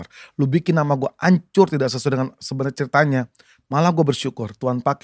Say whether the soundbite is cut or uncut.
uncut